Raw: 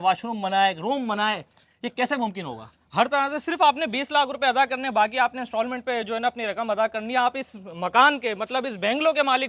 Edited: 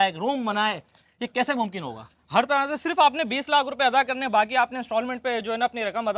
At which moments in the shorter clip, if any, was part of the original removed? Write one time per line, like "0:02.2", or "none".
none

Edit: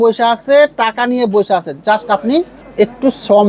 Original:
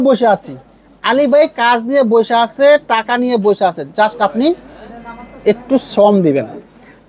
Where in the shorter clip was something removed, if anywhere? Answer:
0:02.6

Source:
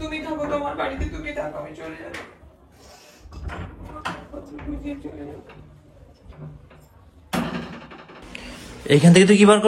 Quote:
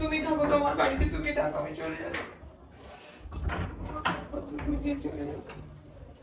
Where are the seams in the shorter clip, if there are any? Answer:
none

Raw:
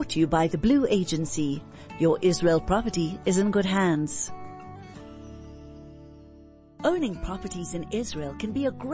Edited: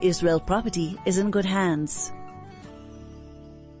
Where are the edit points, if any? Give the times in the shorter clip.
0:01.9

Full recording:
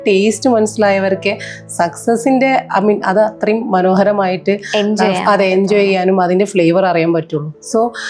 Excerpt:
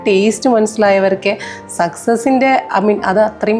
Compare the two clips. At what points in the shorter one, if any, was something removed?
none

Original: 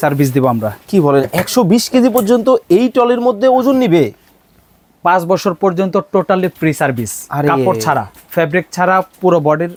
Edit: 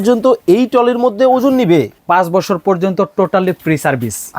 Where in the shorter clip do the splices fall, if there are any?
0:02.0

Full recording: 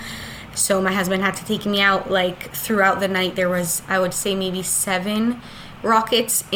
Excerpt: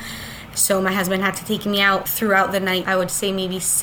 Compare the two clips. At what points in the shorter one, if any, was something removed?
0:02.0
0:02.8

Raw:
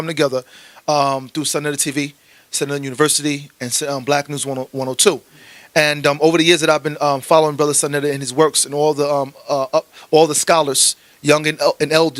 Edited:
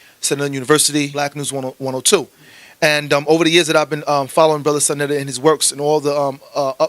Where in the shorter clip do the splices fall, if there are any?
0:01.1

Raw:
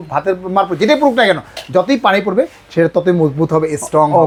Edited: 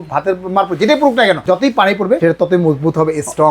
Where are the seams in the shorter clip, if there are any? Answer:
0:01.8

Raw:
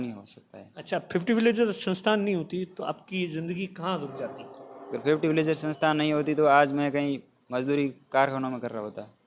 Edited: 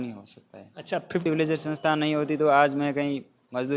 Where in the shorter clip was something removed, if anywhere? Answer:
0:01.2

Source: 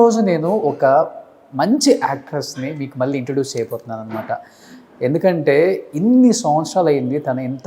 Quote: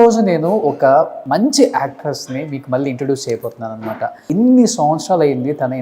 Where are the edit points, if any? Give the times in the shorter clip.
0:01.2
0:04.2

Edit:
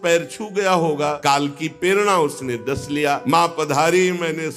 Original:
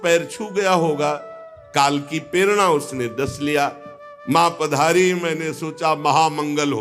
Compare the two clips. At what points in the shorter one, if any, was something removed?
0:01.2
0:03.2

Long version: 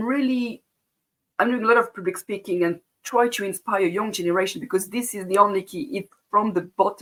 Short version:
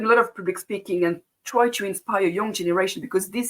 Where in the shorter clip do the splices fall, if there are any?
none

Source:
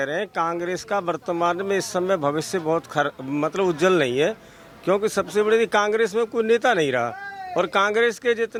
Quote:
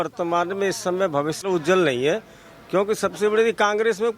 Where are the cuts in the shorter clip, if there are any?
0:01.4

